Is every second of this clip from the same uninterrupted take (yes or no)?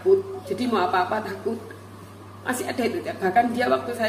yes